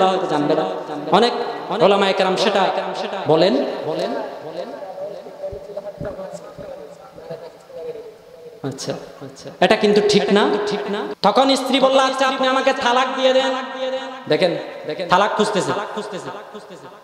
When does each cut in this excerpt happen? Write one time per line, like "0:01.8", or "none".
0:11.0